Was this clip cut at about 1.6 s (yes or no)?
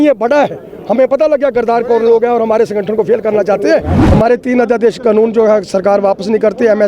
no